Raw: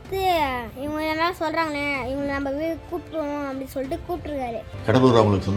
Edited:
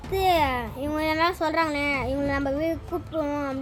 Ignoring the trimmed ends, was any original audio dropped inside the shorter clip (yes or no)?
no